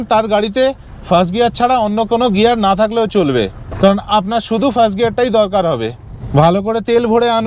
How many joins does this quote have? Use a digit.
0